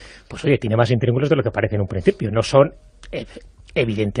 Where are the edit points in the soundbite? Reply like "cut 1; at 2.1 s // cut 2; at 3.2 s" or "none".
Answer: cut 1; at 2.8 s